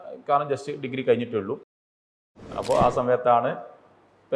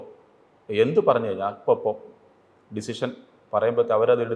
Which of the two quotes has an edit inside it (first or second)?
first